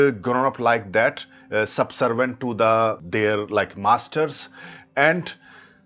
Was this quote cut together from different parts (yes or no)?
yes